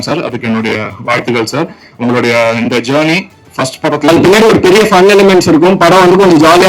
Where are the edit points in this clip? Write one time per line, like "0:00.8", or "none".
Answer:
0:04.1